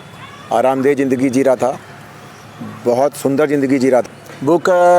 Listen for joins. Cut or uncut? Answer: cut